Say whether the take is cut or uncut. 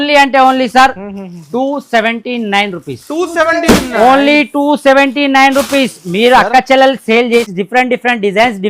cut